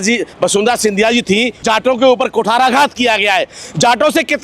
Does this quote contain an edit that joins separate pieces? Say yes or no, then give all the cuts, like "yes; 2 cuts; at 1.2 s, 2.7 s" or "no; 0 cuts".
yes; 1 cut; at 1.6 s